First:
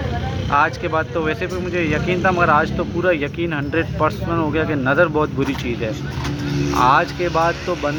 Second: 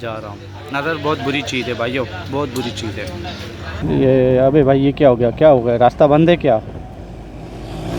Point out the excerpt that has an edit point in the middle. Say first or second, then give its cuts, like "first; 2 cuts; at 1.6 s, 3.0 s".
second; 1 cut; at 3.8 s